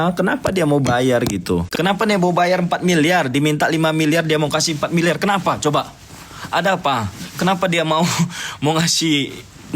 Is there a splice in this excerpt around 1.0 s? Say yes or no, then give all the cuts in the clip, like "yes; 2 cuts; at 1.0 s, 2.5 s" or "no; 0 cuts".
yes; 1 cut; at 1.0 s